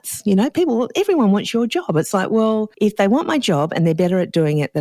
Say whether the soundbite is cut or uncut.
cut